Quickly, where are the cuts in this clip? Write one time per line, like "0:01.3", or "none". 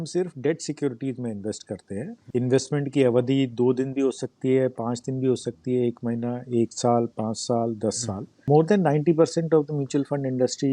0:02.1
0:08.5